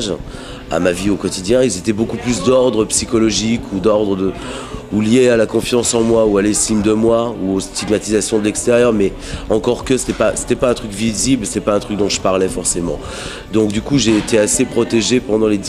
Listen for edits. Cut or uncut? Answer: cut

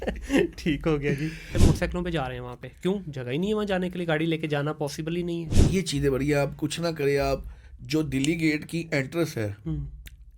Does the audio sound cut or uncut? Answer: cut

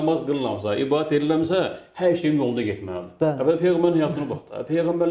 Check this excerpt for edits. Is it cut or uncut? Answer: uncut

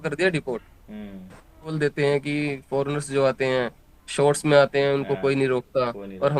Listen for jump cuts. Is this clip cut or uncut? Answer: cut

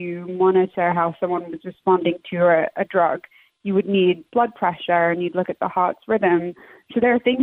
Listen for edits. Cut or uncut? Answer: uncut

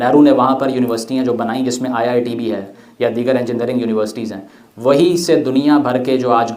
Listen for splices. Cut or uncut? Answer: uncut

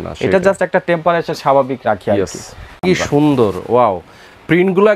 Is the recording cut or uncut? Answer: cut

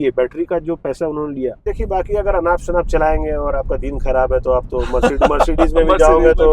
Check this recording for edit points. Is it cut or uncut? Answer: cut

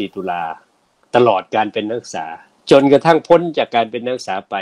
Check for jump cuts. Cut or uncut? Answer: uncut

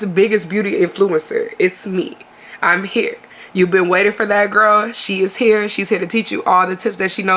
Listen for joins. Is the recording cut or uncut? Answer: uncut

